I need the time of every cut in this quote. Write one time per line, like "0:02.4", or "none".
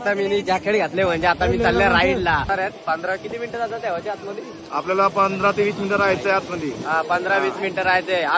0:02.5